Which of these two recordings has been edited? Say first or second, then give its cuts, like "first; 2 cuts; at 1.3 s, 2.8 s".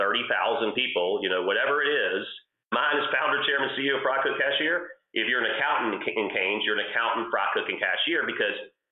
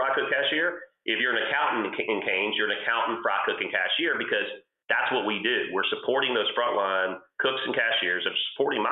first; 1 cut; at 2.7 s